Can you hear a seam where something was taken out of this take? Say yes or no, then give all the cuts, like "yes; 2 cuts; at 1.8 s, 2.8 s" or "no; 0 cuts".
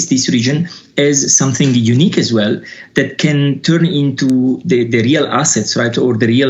no; 0 cuts